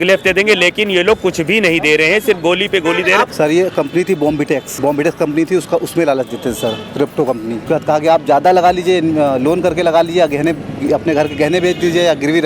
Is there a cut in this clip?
yes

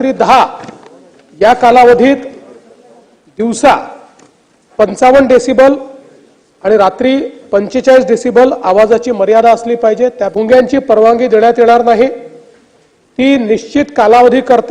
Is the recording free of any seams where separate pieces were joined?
no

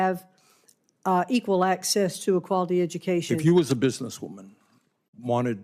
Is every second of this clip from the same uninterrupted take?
no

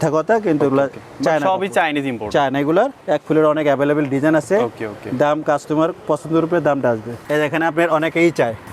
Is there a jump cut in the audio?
no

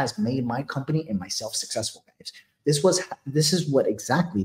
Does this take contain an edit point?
no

